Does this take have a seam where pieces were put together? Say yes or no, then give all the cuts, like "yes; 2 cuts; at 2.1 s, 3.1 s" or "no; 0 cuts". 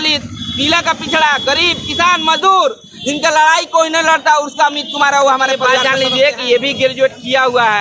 yes; 1 cut; at 5.7 s